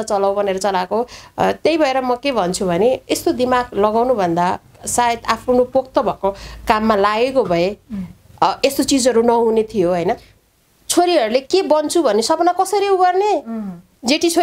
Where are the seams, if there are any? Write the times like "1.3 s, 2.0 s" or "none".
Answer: 10.4 s